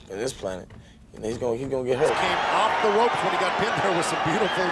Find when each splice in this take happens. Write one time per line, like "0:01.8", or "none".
0:02.2